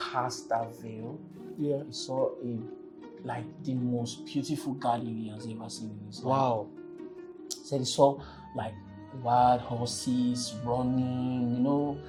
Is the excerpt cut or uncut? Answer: uncut